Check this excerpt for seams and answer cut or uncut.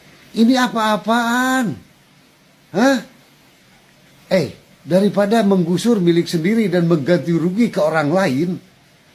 uncut